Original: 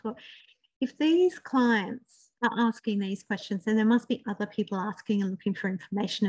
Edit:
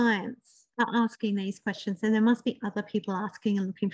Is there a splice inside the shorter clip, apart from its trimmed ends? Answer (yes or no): no